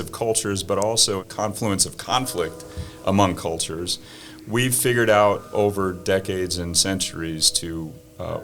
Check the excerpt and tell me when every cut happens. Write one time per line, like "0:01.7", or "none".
0:01.2